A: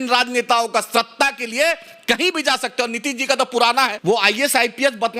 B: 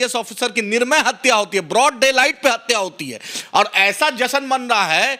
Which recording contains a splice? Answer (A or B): A